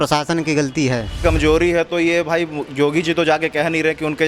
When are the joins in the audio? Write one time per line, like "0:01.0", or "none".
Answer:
0:01.2